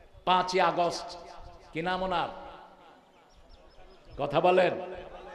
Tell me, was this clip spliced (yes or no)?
no